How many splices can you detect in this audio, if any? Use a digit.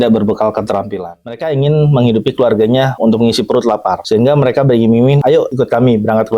4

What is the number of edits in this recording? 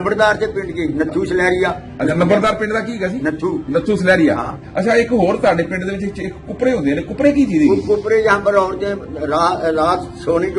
1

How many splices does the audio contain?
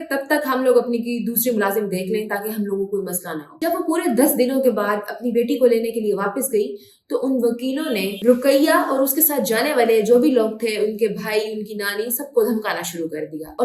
0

